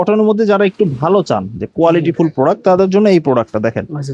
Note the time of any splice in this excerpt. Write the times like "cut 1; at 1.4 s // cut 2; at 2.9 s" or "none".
none